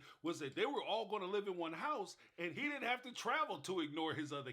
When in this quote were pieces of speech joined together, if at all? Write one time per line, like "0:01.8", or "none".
0:02.5